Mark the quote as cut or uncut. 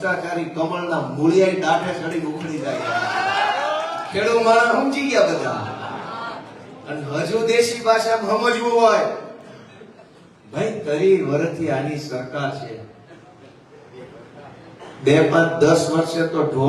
cut